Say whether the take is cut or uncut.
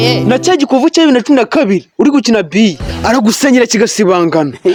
uncut